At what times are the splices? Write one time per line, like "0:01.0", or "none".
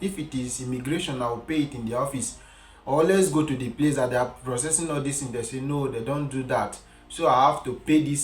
none

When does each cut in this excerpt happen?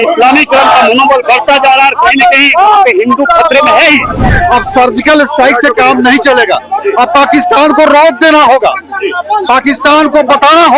0:04.2

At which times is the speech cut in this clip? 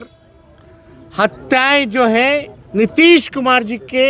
0:02.9

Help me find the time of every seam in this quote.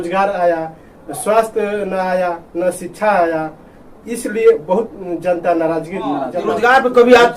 0:06.4

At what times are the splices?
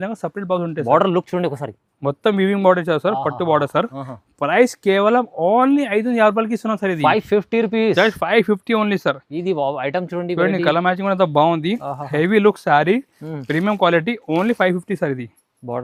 none

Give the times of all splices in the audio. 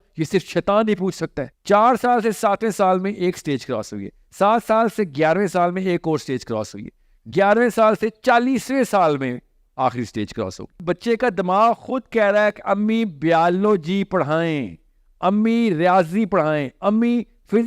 0:01.5
0:10.7

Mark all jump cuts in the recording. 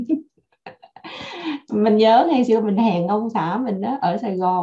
none

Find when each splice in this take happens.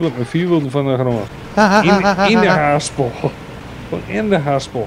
0:01.4

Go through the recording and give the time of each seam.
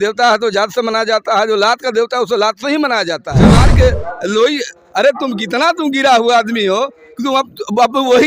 0:03.5

